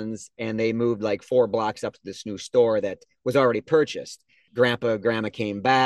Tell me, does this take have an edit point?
yes; 1 cut; at 4.4 s

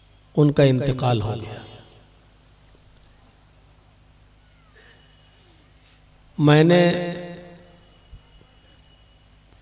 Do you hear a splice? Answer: no; 0 cuts

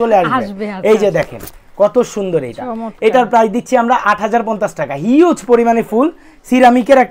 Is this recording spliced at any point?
no; 0 cuts

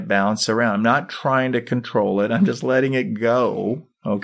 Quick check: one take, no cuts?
yes; 0 cuts

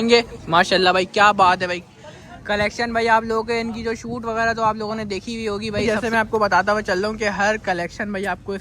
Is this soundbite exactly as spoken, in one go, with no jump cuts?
no; 1 cut; at 5.8 s

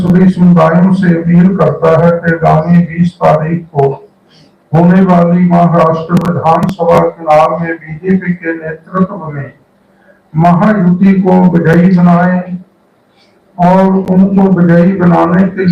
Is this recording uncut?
yes; 0 cuts

